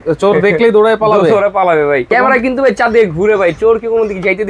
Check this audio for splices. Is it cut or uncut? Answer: cut